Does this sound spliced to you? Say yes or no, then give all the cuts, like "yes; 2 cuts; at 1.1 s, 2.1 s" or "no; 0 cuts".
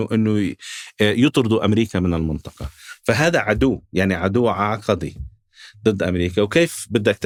no; 0 cuts